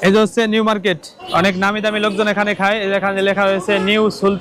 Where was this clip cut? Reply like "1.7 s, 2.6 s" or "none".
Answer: 1.1 s